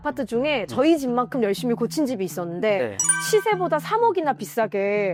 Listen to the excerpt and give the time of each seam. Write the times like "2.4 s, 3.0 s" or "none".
none